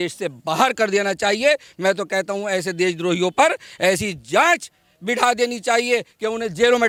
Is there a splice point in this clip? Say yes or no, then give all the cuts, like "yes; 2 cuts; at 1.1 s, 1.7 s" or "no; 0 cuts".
no; 0 cuts